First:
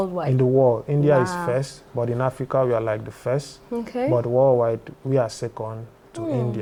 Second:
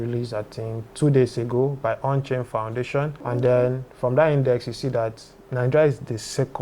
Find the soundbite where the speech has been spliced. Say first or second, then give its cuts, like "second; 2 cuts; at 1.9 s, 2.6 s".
second; 1 cut; at 3.2 s